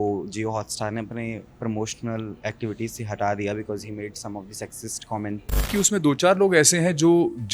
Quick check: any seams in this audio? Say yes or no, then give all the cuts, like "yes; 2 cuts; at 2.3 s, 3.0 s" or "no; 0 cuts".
yes; 1 cut; at 5.7 s